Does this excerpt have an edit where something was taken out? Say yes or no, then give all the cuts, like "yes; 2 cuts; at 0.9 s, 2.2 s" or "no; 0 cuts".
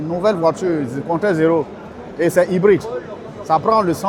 no; 0 cuts